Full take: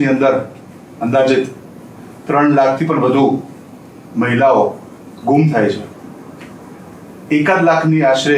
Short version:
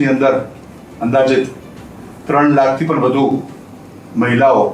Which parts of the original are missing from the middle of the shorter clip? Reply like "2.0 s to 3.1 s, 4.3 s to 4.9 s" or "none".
none